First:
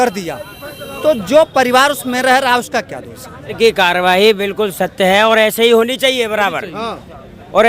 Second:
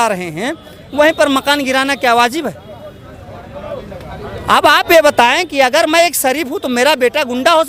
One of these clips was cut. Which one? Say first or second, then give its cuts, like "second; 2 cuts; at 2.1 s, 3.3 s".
first; 1 cut; at 3.5 s